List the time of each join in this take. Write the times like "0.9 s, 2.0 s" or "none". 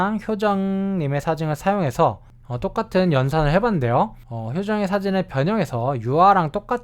4.3 s